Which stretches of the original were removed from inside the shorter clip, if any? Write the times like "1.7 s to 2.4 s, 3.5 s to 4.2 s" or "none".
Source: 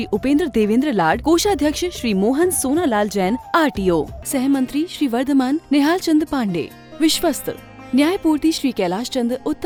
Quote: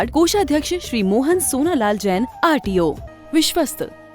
4.2 s to 6.8 s